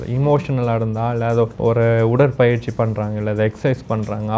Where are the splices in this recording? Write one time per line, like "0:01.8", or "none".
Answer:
0:01.5